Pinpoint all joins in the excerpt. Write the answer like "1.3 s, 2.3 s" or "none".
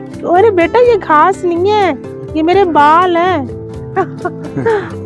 none